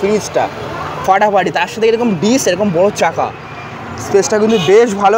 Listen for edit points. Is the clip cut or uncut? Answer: uncut